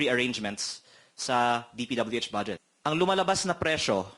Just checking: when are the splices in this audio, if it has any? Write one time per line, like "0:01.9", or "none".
0:02.6